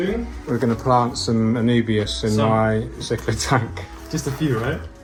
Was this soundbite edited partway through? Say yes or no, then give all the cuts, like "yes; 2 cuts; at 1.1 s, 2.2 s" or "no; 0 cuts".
no; 0 cuts